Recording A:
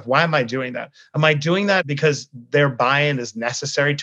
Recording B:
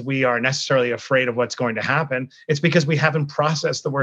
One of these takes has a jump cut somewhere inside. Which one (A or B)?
A